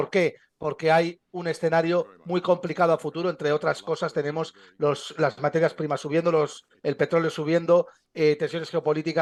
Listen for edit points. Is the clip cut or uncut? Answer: uncut